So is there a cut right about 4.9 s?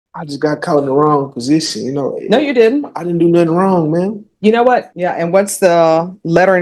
yes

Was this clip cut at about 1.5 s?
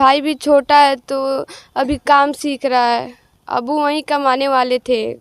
no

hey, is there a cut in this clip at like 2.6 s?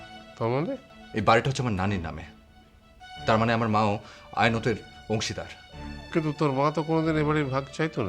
no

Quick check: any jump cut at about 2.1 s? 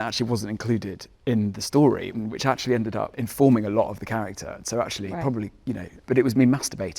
yes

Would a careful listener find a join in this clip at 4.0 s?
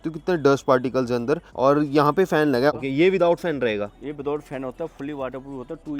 no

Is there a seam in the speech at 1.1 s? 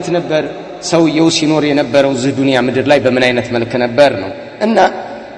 no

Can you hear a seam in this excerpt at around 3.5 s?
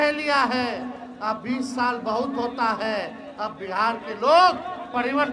no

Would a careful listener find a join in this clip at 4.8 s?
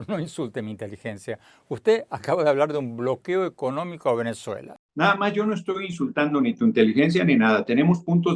yes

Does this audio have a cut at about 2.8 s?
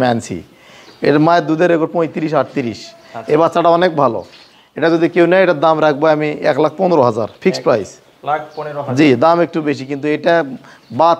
no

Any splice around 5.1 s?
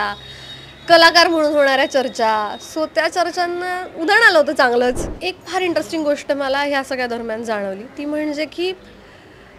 yes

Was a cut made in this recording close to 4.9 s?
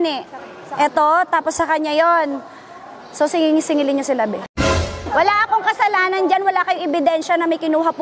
yes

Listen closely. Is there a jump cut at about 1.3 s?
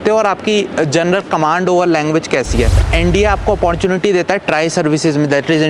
no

